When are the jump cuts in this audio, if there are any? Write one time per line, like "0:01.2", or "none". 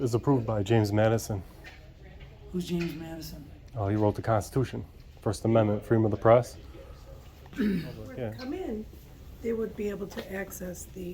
0:08.2

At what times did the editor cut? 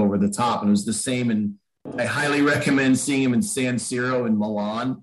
0:01.9

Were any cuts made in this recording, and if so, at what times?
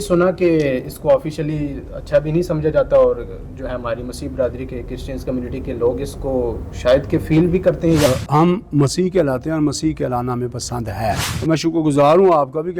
0:08.1
0:11.3

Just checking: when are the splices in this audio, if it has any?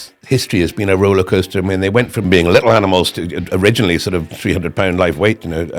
0:02.2

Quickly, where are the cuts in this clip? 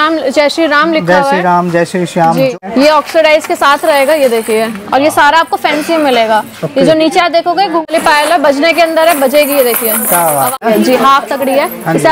0:02.5
0:07.9
0:10.5

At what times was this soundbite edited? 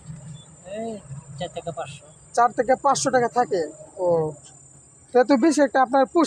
none

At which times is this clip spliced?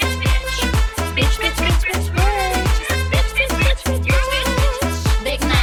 none

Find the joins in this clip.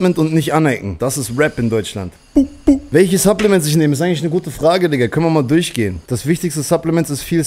0:00.9
0:02.2
0:06.0

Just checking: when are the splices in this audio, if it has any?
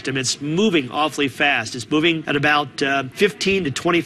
0:02.2
0:03.1

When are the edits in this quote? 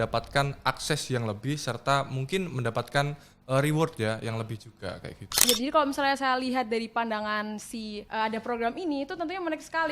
0:05.5
0:08.0

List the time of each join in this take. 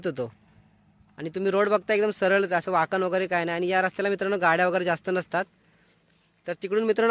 none

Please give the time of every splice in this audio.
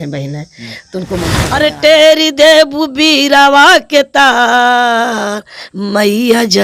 0:01.4

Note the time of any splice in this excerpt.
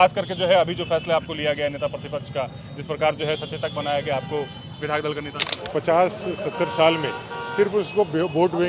0:05.5

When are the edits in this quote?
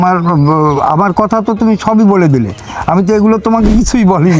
none

